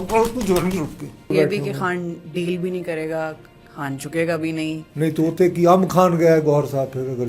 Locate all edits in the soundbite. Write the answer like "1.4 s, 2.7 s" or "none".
1.3 s, 4.9 s